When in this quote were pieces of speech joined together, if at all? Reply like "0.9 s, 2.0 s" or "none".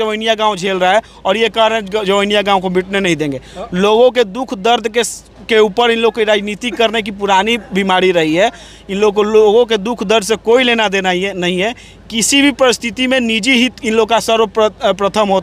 none